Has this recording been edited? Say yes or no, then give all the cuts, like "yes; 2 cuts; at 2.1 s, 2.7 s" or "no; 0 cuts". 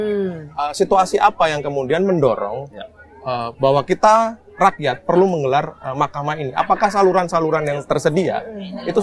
no; 0 cuts